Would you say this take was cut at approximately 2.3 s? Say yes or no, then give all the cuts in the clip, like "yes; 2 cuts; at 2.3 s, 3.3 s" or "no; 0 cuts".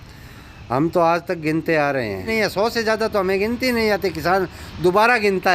yes; 1 cut; at 2.3 s